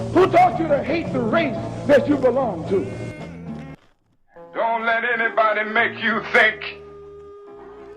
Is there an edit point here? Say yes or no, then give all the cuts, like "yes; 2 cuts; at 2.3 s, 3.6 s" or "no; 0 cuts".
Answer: yes; 1 cut; at 3.8 s